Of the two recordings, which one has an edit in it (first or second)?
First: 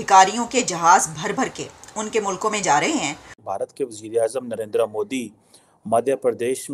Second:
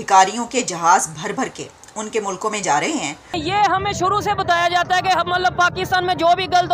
second